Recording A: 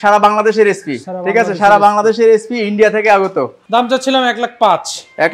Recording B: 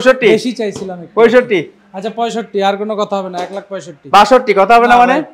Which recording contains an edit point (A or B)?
A